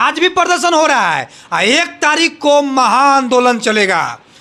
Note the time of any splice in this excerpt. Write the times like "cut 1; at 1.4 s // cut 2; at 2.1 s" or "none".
none